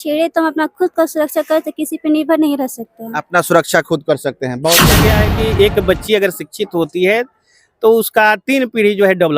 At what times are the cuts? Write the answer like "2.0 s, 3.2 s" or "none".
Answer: 4.9 s